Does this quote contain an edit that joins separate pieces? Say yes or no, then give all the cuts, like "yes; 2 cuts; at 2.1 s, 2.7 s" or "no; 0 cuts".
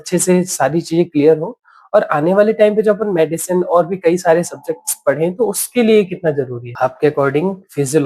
yes; 1 cut; at 6.6 s